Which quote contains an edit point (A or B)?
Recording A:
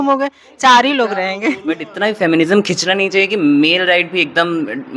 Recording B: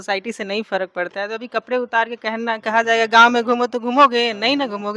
A